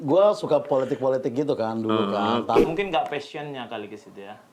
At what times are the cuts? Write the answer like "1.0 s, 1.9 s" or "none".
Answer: 2.6 s